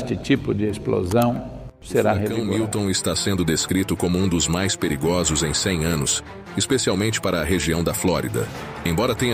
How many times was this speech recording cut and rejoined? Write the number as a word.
one